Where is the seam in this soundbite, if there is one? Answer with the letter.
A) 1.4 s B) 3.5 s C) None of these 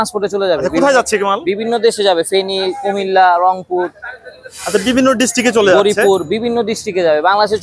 C